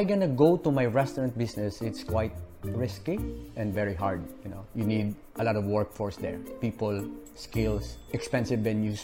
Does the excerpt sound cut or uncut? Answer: cut